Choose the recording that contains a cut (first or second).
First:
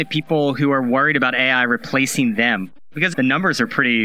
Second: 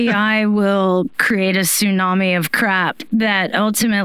first